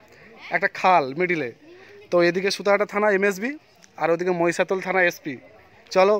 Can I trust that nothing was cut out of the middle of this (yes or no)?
yes